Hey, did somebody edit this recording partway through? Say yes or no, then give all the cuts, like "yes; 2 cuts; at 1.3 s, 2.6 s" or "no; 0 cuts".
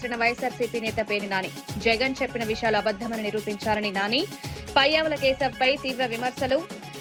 no; 0 cuts